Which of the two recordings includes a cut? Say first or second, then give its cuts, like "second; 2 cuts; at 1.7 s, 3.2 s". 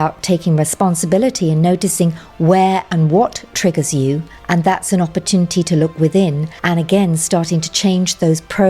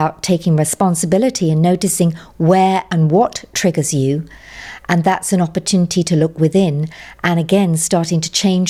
first; 2 cuts; at 4.3 s, 6.5 s